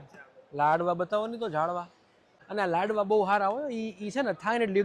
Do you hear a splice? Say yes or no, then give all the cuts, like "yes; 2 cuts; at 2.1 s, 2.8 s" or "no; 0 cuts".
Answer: yes; 1 cut; at 2.4 s